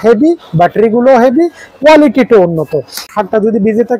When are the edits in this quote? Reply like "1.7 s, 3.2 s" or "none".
3.0 s

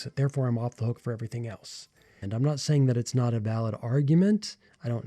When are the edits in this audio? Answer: 2.3 s

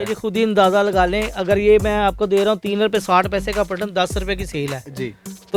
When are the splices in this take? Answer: none

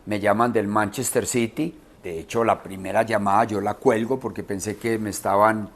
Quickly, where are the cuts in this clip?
1.9 s

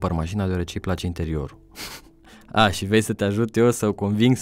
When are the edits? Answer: none

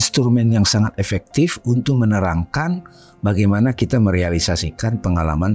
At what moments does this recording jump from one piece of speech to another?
none

